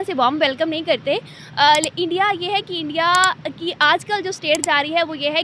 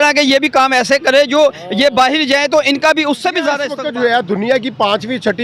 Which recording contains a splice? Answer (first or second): second